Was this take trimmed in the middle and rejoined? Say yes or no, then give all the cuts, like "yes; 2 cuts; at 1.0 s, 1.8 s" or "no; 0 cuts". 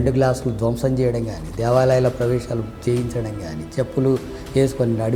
no; 0 cuts